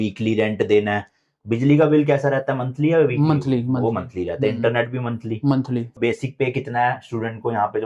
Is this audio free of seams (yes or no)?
no